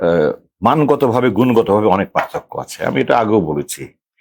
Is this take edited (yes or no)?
no